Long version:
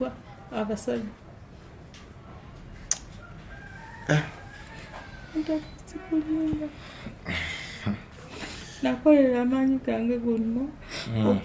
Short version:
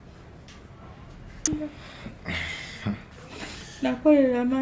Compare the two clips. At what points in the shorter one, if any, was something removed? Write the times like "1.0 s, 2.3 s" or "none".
1.5 s